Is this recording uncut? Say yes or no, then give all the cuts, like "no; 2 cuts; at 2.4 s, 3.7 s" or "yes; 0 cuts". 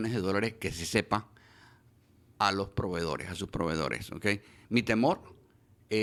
yes; 0 cuts